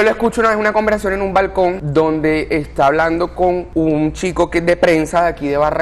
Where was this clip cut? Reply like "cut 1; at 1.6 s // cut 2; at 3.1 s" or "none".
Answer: none